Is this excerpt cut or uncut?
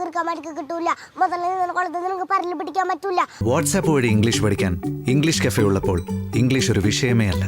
cut